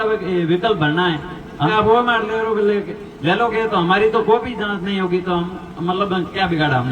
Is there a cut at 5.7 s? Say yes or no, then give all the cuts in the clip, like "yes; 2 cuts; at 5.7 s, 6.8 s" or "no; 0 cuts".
no; 1 cut; at 1.7 s